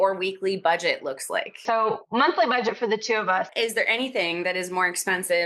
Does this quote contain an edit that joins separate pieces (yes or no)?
yes